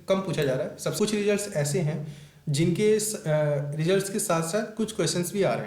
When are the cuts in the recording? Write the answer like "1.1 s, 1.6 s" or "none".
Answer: 1.0 s